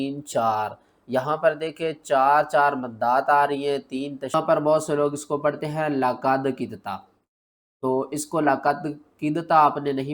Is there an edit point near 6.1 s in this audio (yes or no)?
no